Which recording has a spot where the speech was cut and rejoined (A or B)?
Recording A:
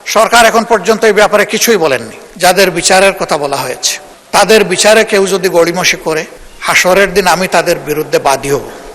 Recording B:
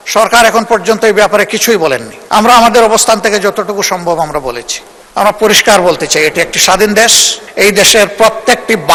A